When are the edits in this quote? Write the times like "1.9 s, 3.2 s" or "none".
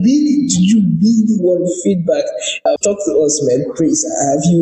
2.5 s